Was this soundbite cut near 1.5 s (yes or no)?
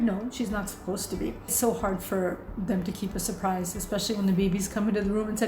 yes